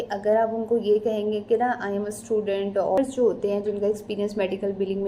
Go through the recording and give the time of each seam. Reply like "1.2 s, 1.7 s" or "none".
3.0 s

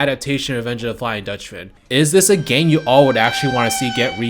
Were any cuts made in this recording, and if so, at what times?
1.6 s

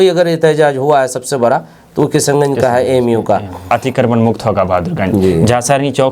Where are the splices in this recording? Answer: 3.7 s

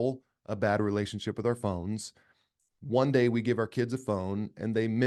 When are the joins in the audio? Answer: none

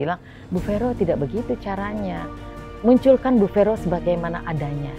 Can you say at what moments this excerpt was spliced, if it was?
none

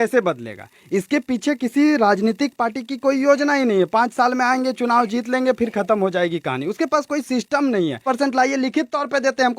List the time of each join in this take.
8.0 s

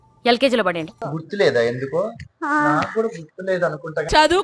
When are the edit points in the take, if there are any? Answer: none

